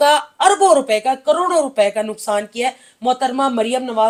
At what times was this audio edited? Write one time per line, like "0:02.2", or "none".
none